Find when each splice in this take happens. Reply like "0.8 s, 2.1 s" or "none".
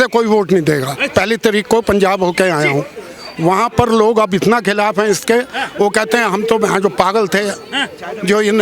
1.0 s